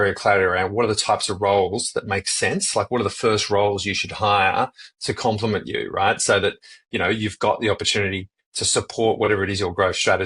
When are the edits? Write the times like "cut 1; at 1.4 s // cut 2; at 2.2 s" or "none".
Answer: none